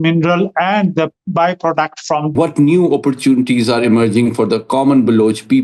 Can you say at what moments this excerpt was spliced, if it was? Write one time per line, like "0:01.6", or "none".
0:02.3